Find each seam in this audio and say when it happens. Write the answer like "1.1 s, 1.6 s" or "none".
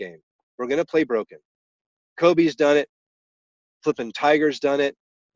none